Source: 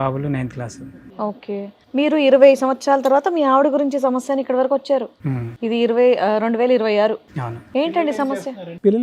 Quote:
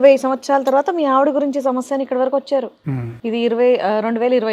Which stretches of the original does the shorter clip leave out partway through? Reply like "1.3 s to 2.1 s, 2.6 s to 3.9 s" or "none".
none